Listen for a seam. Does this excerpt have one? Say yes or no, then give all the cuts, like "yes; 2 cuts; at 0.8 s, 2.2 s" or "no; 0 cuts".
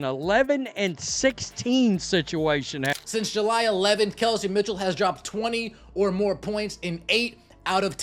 yes; 1 cut; at 3.0 s